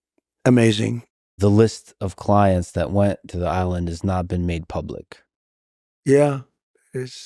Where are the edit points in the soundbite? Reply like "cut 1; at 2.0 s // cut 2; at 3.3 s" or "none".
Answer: cut 1; at 1.2 s